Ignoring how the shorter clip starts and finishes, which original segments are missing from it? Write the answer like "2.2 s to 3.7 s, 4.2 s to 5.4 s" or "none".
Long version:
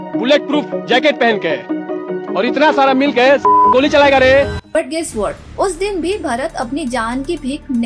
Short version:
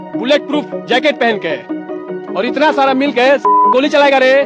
none